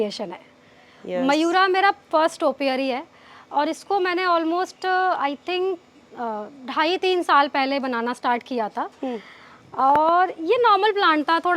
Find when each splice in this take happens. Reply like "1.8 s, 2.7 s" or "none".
none